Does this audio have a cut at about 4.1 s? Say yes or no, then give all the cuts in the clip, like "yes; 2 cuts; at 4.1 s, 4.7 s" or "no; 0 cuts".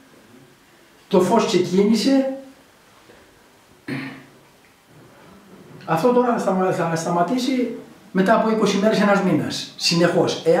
yes; 1 cut; at 4.1 s